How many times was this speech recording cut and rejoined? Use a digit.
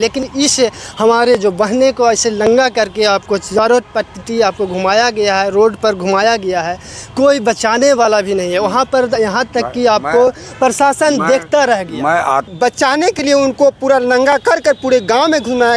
1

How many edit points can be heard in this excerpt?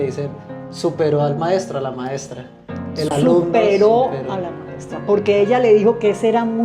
0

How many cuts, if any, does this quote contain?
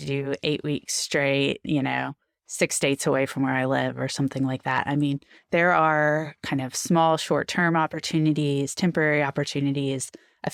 0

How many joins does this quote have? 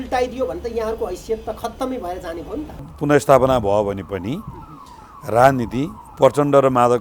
1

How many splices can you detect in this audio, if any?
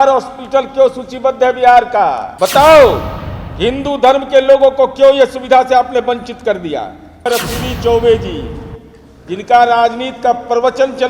2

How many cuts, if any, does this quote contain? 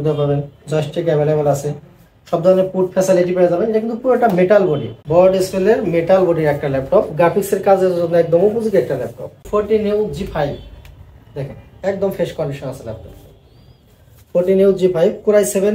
1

